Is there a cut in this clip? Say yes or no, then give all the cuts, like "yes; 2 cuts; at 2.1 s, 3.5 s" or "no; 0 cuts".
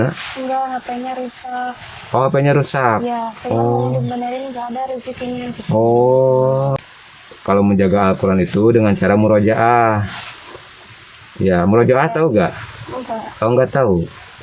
yes; 1 cut; at 6.7 s